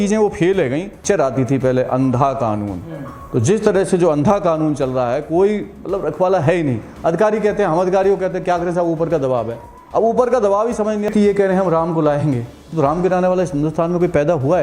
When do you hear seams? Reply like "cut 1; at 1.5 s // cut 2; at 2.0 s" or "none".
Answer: cut 1; at 1.0 s // cut 2; at 11.1 s